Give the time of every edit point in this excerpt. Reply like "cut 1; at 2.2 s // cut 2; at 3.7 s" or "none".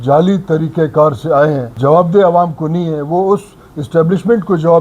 cut 1; at 1.7 s